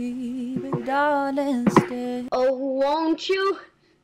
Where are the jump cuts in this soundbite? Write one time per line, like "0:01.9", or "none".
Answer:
0:02.2